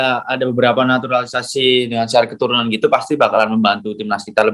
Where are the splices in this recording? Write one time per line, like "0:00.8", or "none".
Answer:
none